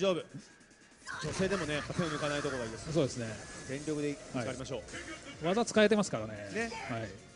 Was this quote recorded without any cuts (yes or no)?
no